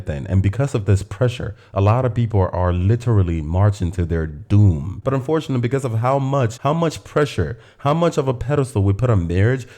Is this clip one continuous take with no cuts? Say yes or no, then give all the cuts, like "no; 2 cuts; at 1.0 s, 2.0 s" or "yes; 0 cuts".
no; 1 cut; at 4.9 s